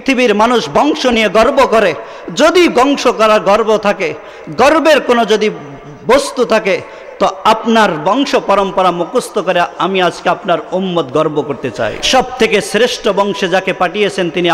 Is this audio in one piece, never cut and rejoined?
no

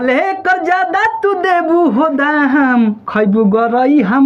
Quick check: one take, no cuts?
yes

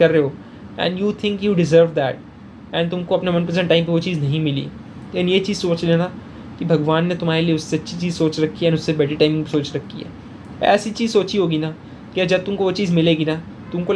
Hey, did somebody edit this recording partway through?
no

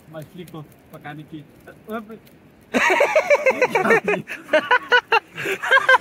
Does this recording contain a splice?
no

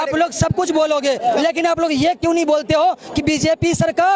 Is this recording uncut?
yes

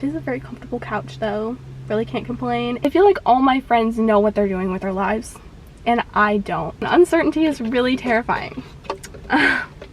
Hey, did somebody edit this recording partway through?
yes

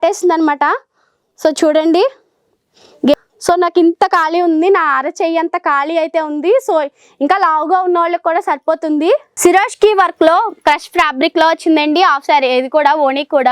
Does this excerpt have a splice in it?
yes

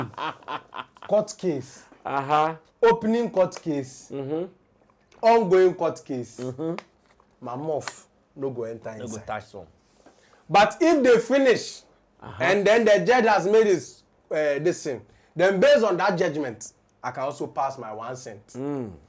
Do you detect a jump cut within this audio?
no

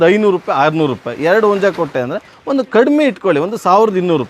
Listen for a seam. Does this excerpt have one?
no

